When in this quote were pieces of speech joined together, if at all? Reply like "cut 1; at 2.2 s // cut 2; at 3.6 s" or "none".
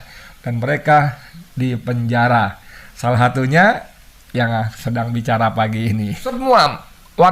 cut 1; at 6.3 s